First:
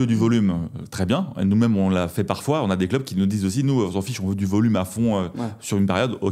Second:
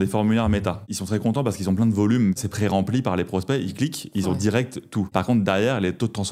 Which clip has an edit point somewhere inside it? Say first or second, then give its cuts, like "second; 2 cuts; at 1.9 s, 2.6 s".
second; 3 cuts; at 0.9 s, 2.4 s, 5.1 s